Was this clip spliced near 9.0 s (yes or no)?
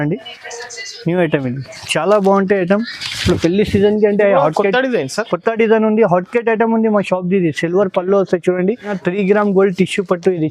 yes